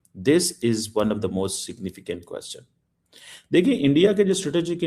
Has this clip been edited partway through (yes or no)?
no